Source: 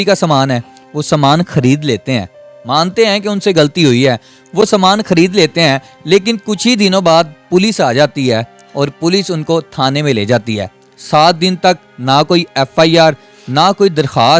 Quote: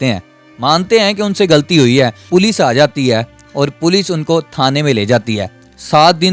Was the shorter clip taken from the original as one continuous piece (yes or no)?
no